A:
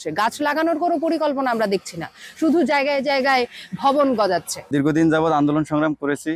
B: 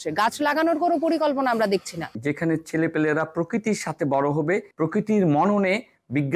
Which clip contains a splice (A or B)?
B